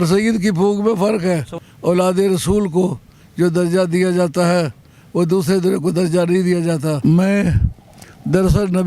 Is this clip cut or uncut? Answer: cut